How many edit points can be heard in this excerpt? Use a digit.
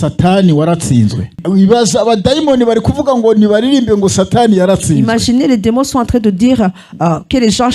1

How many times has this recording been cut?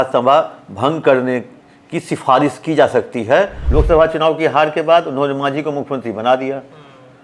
1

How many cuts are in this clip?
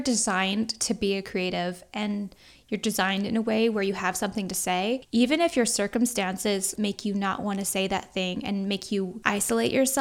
3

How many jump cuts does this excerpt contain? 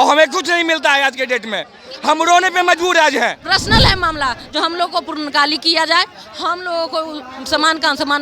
1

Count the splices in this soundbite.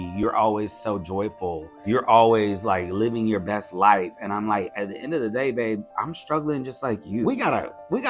3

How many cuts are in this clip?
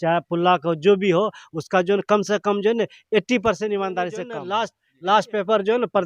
1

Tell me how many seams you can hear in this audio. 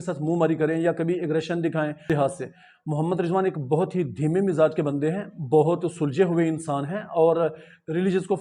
1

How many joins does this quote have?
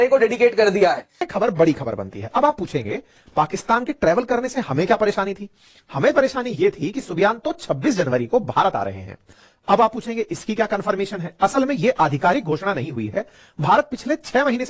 1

